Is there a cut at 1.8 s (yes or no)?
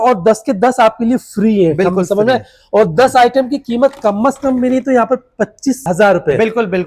no